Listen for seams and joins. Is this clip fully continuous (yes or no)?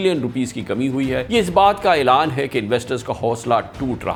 yes